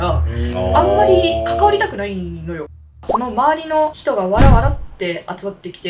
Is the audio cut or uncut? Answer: cut